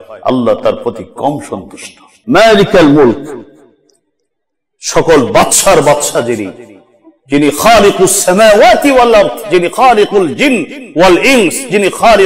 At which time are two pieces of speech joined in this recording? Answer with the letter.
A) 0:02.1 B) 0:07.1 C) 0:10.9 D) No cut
A